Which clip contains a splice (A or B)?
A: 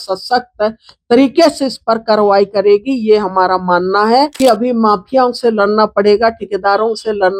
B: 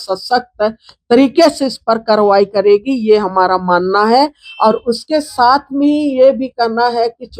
A